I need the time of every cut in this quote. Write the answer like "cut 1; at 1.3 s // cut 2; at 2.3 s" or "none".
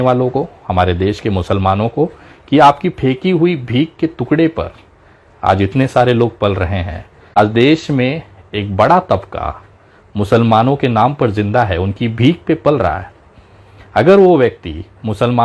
cut 1; at 7.2 s